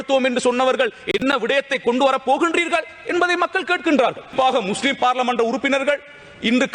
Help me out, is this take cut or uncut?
cut